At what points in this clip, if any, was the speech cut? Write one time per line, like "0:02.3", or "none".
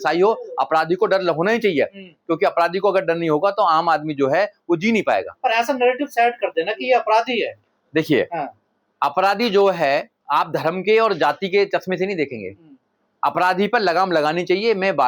none